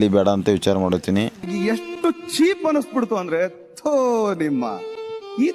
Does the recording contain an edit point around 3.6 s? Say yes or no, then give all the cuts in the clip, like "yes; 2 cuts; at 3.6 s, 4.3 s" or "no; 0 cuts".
no; 1 cut; at 1.4 s